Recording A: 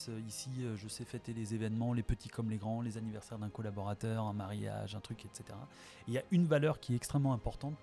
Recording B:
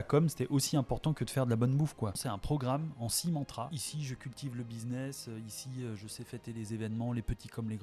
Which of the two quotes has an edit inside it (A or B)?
B